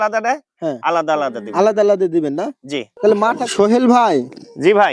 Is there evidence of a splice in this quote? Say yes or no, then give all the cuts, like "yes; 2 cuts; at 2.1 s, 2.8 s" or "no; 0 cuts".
yes; 1 cut; at 3.4 s